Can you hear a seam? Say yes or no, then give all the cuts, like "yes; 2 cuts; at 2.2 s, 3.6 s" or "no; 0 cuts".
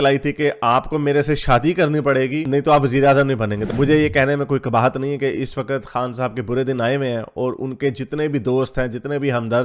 yes; 1 cut; at 3.7 s